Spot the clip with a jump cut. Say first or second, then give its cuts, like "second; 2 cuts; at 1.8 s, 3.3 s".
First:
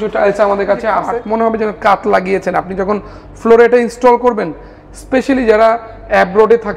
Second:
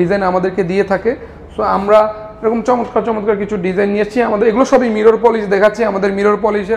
first; 1 cut; at 1.1 s